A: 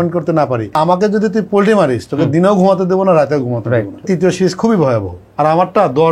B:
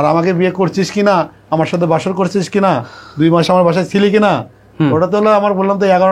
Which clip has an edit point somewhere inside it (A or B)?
A